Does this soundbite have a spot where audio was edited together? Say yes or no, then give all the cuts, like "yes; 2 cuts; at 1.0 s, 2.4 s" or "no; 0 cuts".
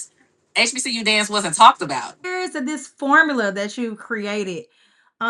yes; 1 cut; at 2.2 s